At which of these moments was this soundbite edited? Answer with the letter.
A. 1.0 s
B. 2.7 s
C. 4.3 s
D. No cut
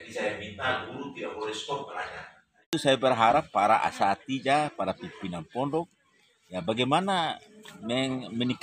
B